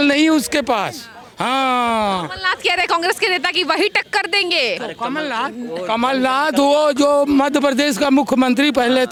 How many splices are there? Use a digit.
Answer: 0